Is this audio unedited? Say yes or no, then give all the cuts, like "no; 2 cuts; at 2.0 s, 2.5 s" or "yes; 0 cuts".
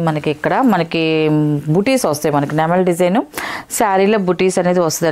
yes; 0 cuts